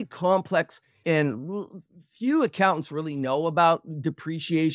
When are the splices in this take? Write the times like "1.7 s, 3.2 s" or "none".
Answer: 1.0 s